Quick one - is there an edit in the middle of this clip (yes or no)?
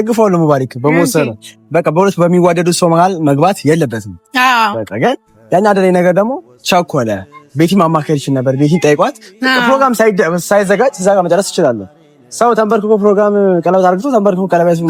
no